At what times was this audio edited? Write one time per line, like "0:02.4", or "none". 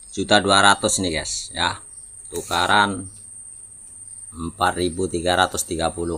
none